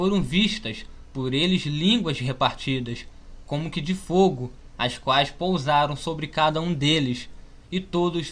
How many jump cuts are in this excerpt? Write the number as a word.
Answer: one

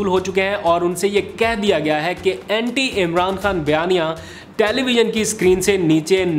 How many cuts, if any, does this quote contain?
zero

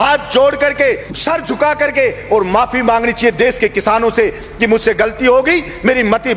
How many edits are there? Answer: one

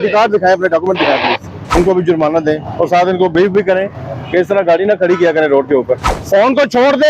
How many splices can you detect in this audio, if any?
two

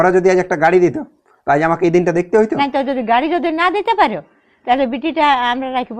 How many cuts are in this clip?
one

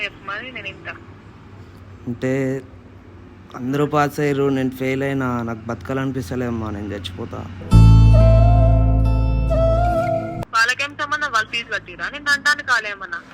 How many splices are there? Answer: one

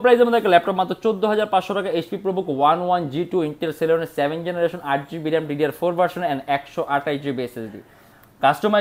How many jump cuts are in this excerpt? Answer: zero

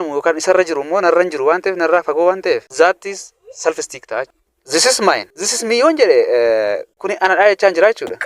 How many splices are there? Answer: one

